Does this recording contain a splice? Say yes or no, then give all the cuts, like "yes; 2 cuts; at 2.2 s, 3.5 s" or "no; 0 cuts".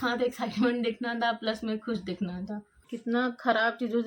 yes; 1 cut; at 2.9 s